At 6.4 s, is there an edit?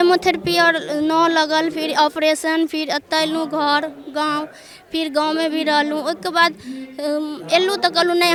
no; 0 cuts

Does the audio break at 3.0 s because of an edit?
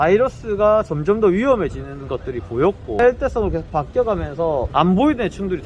yes; 2 cuts; at 3.0 s, 4.7 s

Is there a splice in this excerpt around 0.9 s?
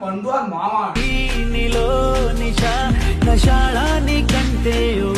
yes; 1 cut; at 0.9 s

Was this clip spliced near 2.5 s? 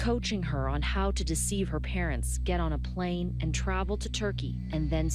no; 1 cut; at 3.9 s

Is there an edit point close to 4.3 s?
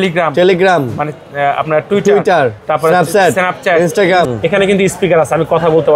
yes; 1 cut; at 4.3 s

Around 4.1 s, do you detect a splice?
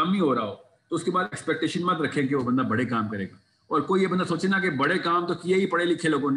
no; 0 cuts

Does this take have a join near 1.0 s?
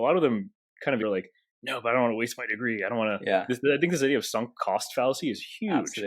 yes; 1 cut; at 1.0 s

